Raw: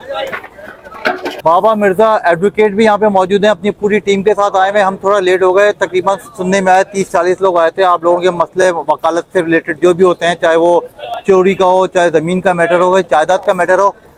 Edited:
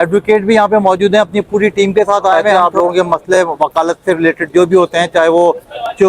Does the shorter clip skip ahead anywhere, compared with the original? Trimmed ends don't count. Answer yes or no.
yes